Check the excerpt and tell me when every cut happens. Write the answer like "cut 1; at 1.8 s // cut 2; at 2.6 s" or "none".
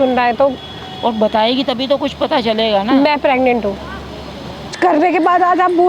cut 1; at 4.8 s